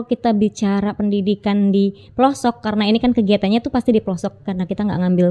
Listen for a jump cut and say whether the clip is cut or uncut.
uncut